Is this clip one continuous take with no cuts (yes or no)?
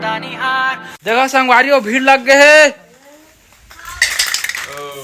no